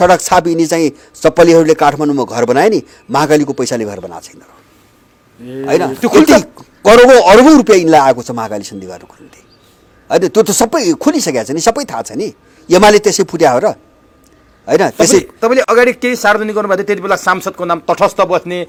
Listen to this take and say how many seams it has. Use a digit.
0